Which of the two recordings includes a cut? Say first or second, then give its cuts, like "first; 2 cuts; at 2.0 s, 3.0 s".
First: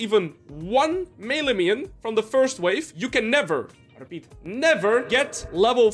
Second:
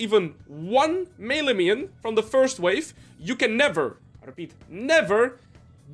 first; 2 cuts; at 2.9 s, 5.1 s